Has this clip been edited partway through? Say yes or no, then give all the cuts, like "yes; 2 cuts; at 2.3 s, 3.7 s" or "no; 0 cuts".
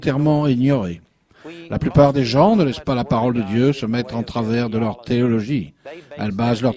yes; 1 cut; at 3.5 s